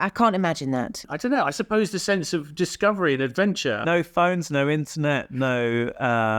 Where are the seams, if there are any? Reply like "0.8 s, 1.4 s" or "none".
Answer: 1.0 s, 3.8 s